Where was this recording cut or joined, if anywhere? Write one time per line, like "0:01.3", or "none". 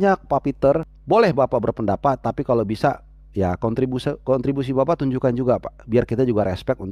0:00.9